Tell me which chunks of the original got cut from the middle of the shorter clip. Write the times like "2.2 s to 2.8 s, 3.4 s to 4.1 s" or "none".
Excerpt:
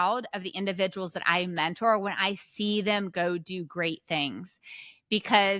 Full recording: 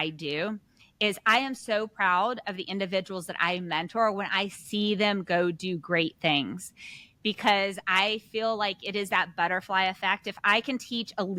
none